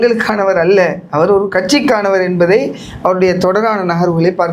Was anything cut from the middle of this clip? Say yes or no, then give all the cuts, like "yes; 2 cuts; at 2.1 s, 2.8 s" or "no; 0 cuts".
no; 0 cuts